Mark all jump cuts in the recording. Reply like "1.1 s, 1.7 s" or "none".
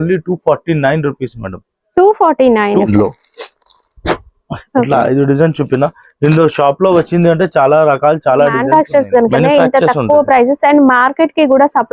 2.9 s, 8.6 s

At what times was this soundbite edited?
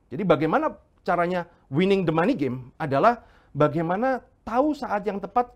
none

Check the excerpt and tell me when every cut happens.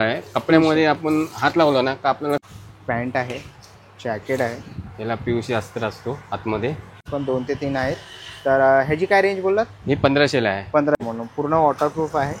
2.4 s, 7.1 s, 11.0 s

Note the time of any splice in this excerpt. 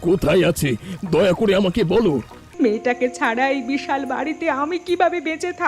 2.4 s

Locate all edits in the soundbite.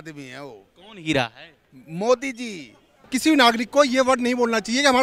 3.1 s

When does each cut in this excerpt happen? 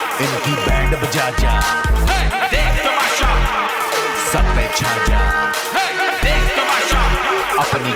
none

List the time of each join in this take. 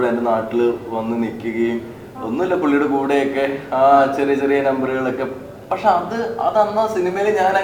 none

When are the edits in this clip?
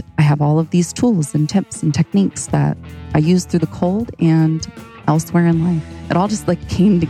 5.9 s

